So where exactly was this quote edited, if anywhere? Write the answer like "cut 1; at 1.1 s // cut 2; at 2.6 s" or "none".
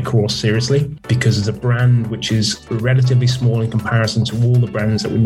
none